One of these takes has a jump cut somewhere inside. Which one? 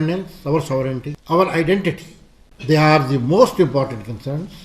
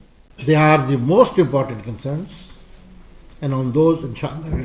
first; 1 cut; at 1.1 s

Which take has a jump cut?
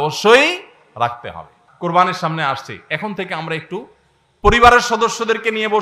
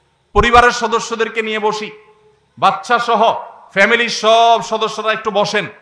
first; 1 cut; at 1.6 s

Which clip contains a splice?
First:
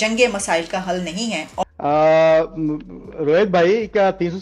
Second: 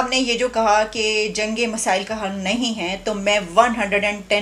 first; 1 cut; at 1.6 s

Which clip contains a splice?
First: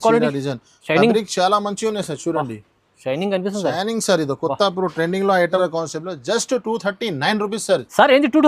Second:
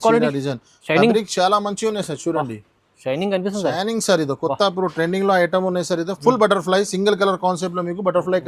first; 1 cut; at 5.6 s

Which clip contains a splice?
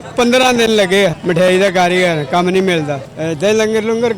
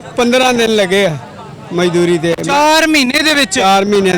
first; 2 cuts; at 1.2 s, 3.1 s

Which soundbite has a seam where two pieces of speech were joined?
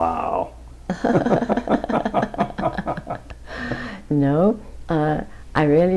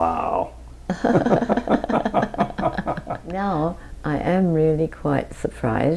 second; 1 cut; at 3.3 s

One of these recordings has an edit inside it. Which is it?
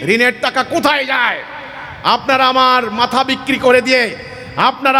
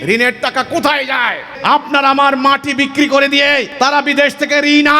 second; 2 cuts; at 1.4 s, 3.7 s

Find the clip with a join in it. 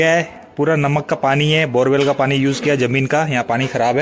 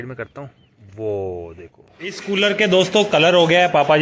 second; 1 cut; at 2.2 s

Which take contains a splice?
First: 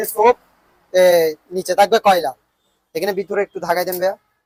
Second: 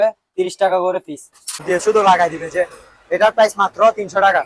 second; 1 cut; at 1.6 s

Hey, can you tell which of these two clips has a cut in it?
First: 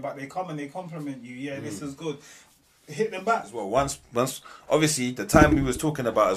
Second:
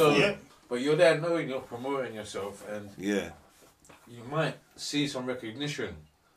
first; 1 cut; at 3.6 s

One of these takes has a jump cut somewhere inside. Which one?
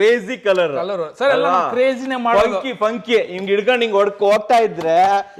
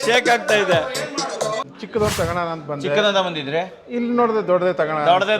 second; 1 cut; at 1.6 s

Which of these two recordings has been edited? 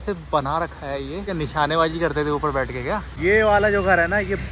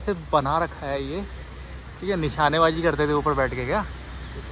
first; 2 cuts; at 1.3 s, 3.1 s

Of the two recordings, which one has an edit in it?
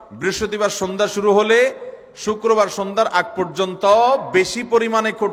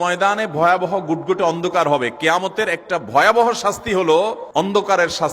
second; 1 cut; at 4.4 s

